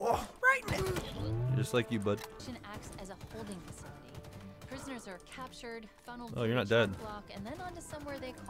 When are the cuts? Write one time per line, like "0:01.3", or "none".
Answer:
0:02.4